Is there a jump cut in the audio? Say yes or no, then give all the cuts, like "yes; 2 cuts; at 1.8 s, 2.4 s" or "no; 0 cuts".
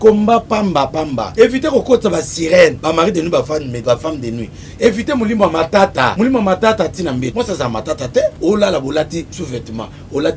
yes; 7 cuts; at 1.2 s, 2.8 s, 3.7 s, 6.1 s, 7.3 s, 8.4 s, 9.4 s